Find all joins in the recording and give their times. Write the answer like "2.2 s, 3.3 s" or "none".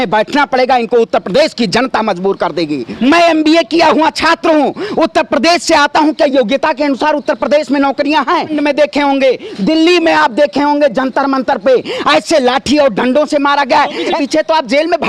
2.9 s, 8.5 s, 14.2 s